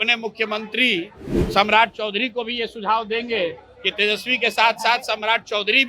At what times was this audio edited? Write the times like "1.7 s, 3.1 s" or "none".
none